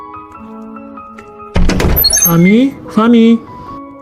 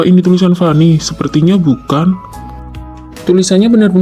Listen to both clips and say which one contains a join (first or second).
first